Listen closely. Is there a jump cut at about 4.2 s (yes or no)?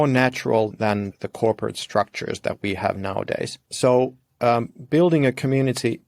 yes